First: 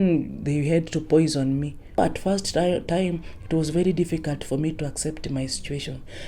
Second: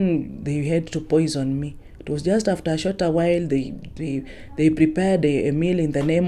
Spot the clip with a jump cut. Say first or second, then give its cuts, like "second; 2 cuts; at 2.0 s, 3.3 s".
first; 1 cut; at 2.0 s